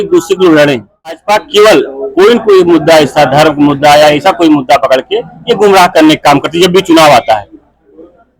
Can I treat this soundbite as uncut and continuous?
no; 1 cut; at 1.1 s

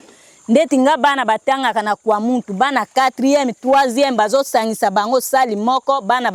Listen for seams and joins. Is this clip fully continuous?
yes; 0 cuts

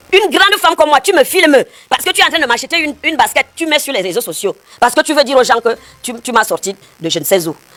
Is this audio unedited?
yes; 0 cuts

